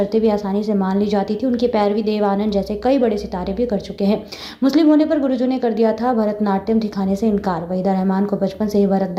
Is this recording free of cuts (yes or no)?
yes